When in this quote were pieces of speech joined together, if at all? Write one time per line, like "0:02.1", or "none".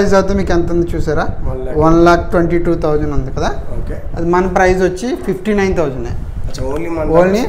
none